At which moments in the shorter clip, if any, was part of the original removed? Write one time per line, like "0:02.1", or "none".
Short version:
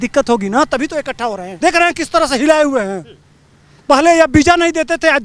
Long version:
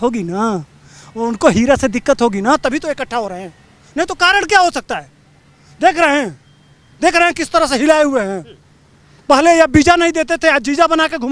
0:01.5